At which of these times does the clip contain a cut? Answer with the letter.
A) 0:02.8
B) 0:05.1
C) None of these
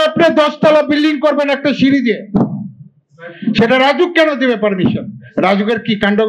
C